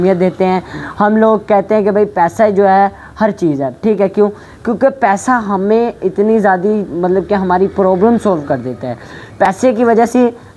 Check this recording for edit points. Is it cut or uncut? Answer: uncut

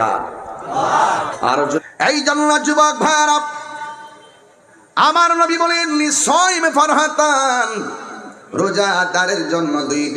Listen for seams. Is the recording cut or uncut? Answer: cut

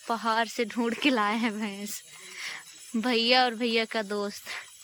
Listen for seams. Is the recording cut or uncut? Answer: uncut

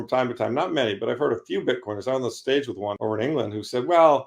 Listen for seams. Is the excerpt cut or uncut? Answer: cut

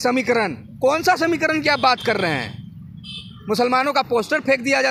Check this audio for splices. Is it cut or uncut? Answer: uncut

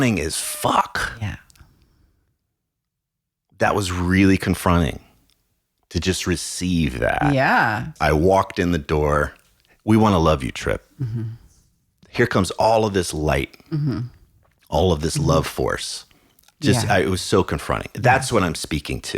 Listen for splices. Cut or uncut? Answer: cut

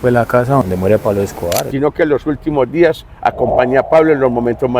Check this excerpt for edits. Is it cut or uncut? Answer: cut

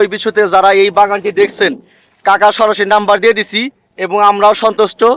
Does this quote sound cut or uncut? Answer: uncut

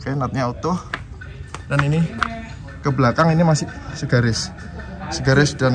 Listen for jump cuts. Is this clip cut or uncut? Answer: uncut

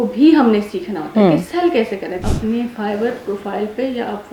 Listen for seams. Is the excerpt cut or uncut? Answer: cut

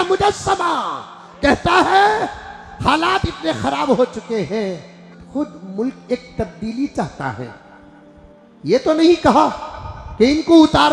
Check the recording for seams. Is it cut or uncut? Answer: cut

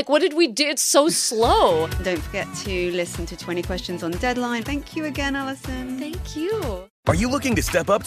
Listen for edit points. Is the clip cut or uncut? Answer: cut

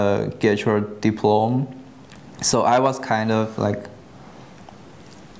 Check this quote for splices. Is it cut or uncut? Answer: uncut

